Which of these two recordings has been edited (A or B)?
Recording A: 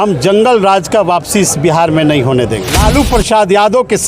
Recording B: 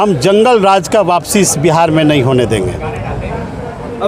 A